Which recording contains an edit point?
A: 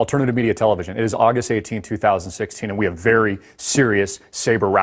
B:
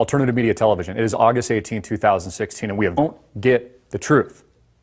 A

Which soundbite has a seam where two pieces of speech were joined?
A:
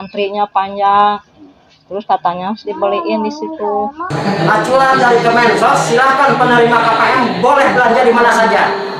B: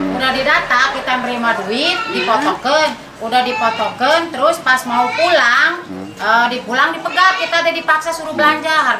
A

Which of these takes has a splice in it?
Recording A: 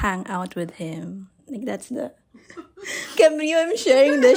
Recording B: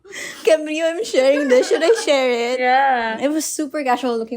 B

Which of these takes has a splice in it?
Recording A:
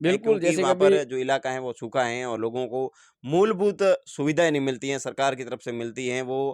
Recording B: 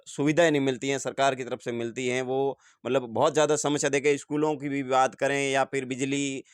A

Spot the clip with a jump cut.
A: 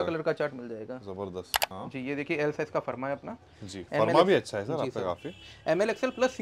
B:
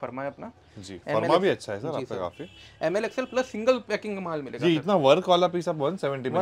A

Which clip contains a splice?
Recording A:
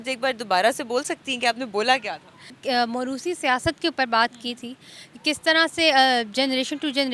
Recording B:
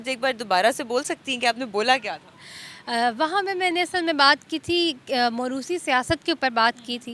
A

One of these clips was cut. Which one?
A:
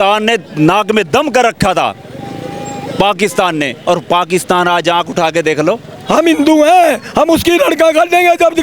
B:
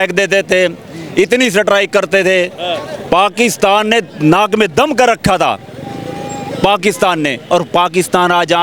A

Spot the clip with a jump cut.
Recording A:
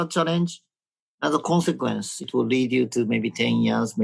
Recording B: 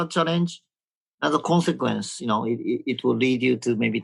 A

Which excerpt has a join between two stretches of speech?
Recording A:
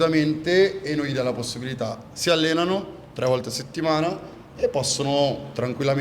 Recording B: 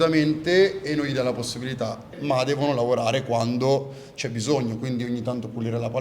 B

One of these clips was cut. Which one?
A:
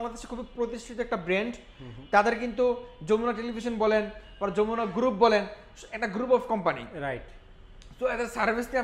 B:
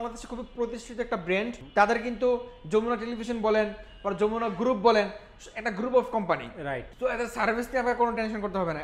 B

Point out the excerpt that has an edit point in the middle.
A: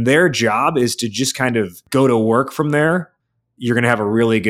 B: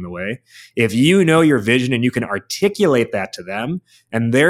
A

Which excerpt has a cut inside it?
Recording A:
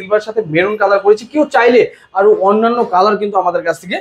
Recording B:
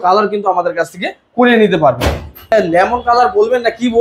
B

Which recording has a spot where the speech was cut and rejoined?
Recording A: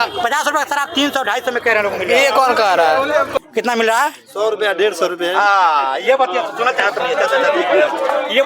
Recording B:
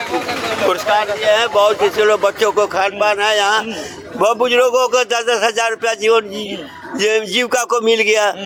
A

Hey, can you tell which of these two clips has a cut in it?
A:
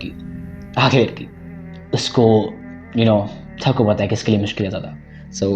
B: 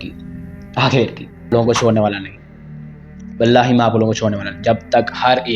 B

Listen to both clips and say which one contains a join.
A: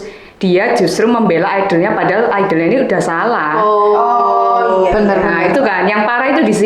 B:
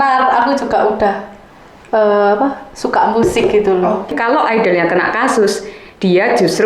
B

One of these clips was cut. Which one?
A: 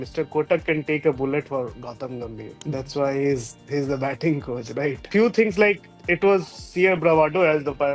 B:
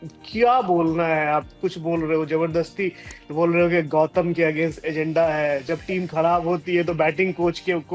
A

